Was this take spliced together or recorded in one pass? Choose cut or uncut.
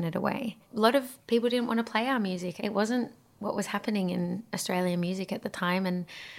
cut